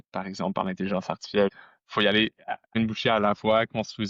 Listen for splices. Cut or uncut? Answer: cut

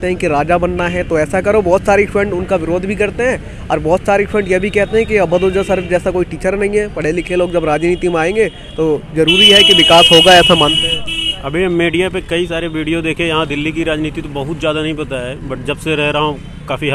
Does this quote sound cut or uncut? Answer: uncut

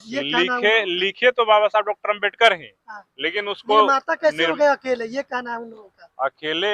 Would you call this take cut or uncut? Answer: uncut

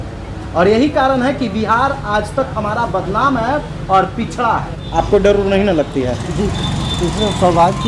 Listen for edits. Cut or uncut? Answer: cut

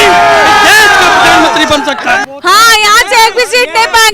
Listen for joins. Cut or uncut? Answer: cut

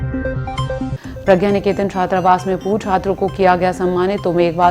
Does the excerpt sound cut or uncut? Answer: cut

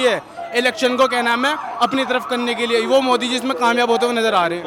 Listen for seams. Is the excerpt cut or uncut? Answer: uncut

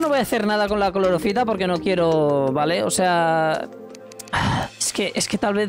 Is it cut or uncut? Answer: uncut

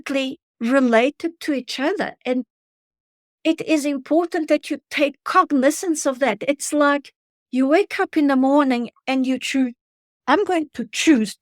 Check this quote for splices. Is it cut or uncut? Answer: uncut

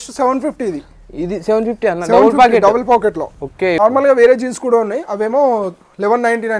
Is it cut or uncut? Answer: cut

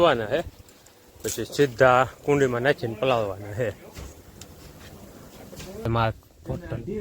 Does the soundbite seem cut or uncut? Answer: cut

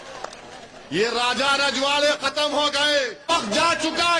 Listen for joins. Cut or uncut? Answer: cut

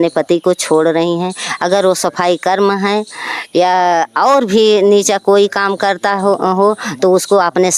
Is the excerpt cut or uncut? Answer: uncut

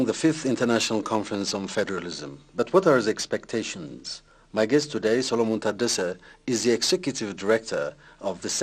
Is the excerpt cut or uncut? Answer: uncut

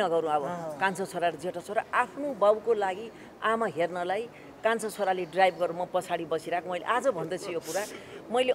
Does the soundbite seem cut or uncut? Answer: uncut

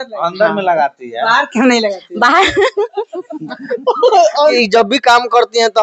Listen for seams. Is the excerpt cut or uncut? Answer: cut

